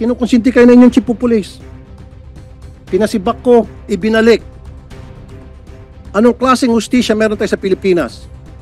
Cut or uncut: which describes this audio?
cut